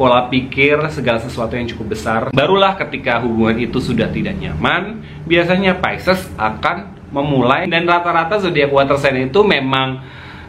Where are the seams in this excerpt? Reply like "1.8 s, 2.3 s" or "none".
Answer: 2.3 s, 7.7 s